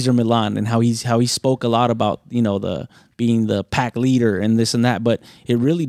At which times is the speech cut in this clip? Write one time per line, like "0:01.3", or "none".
none

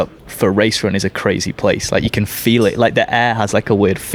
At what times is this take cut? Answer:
none

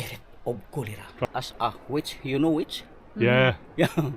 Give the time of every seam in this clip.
0:01.2

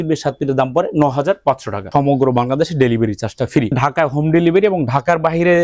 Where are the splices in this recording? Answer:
0:01.9
0:03.7

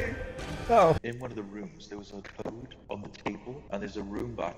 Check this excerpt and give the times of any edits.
0:01.0

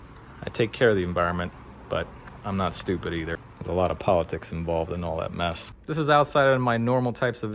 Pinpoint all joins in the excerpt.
0:03.5
0:05.7

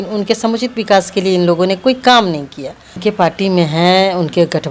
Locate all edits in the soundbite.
0:03.0

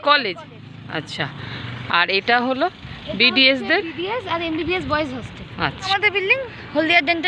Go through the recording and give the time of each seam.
0:05.9

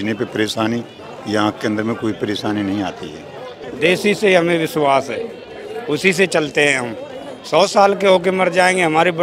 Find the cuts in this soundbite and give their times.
0:03.6

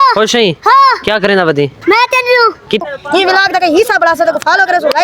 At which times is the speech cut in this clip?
0:02.8

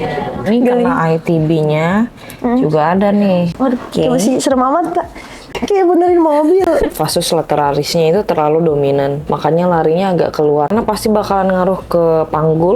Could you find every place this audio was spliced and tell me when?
0:03.5
0:05.6
0:10.7

